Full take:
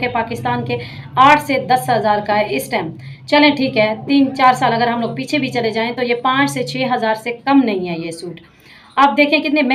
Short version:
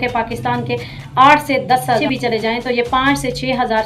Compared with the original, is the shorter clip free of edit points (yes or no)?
no